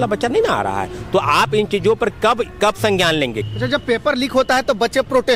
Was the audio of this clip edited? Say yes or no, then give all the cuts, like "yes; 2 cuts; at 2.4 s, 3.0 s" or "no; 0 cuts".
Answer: yes; 1 cut; at 3.4 s